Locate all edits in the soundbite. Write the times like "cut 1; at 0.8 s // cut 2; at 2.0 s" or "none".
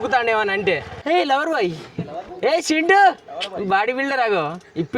cut 1; at 0.9 s